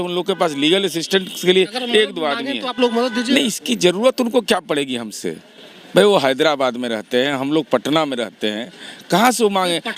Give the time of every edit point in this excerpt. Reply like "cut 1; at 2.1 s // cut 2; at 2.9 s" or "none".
none